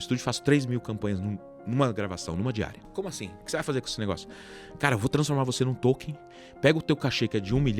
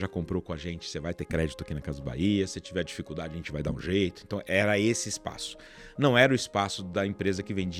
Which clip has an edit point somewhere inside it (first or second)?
first